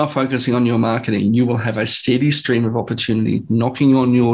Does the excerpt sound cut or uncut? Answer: uncut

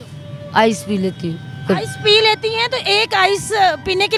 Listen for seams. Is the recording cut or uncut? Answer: uncut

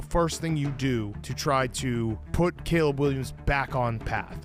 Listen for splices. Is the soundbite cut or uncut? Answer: uncut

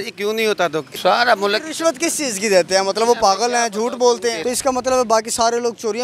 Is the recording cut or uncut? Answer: cut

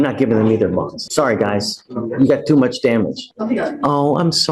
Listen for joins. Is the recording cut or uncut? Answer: cut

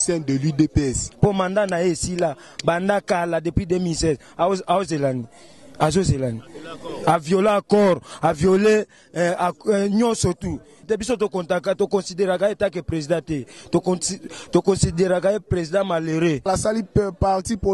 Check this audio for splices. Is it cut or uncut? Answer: cut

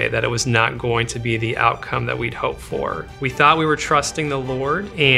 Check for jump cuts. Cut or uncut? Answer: cut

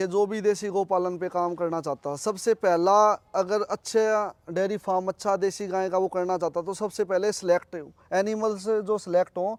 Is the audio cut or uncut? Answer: uncut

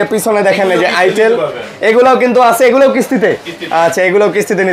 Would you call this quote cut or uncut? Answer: uncut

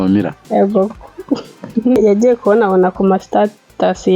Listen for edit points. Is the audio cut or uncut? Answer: cut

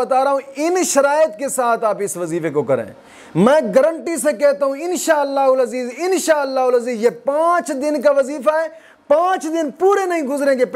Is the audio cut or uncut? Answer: uncut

